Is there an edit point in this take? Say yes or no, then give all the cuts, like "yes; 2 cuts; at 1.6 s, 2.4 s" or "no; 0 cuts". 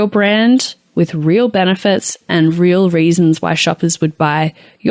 no; 0 cuts